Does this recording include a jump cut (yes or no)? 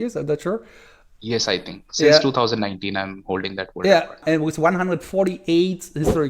yes